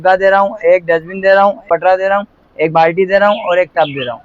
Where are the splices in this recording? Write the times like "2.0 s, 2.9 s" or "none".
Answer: 1.6 s